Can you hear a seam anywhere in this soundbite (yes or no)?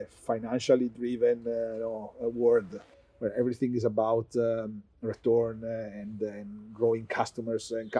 no